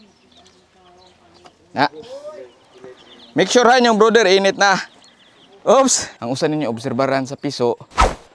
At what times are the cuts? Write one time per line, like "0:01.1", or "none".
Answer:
0:06.1